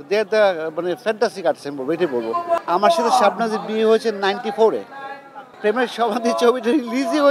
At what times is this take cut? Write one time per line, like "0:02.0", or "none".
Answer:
0:02.6
0:05.5

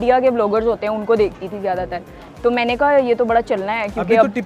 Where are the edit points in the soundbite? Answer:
none

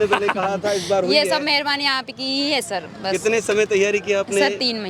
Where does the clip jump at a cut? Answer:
none

